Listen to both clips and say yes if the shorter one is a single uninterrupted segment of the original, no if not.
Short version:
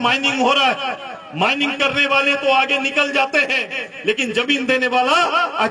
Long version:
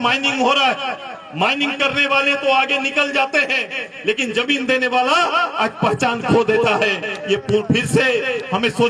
yes